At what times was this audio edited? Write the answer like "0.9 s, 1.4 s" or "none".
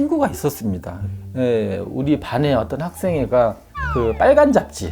1.0 s